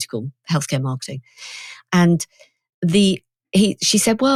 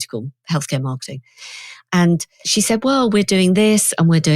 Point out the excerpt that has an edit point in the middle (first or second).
second